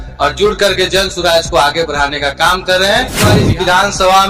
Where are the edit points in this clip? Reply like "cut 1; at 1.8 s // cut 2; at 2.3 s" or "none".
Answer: cut 1; at 3.3 s